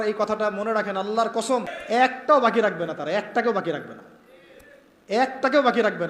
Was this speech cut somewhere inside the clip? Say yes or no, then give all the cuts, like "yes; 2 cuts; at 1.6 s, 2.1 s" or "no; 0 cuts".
yes; 1 cut; at 1.8 s